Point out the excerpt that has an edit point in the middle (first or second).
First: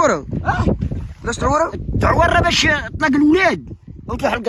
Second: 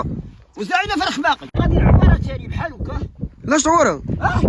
second